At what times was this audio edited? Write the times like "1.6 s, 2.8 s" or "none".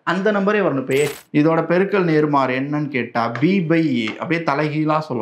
1.2 s